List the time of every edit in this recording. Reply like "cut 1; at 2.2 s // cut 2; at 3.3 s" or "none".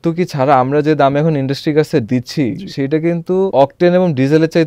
cut 1; at 3.5 s